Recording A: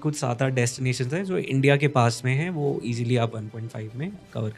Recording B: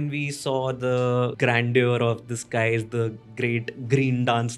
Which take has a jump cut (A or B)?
B